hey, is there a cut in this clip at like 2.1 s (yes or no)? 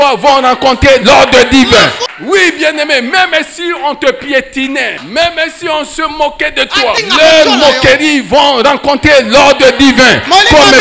yes